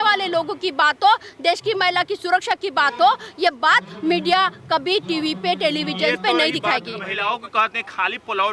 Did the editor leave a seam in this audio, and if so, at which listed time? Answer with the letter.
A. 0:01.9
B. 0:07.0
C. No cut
B